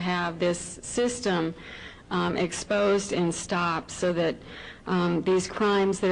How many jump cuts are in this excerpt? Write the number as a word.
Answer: one